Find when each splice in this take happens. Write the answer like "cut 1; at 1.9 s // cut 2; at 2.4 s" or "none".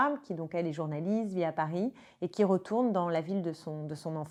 none